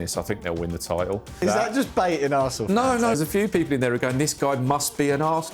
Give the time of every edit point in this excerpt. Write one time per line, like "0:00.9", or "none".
0:01.4
0:03.2